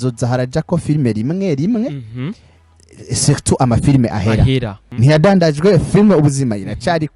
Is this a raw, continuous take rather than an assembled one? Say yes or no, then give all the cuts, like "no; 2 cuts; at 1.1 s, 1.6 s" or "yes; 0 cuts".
no; 1 cut; at 4.8 s